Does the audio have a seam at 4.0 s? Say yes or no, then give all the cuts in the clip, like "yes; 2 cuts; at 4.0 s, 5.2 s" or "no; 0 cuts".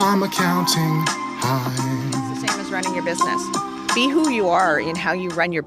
yes; 1 cut; at 4.0 s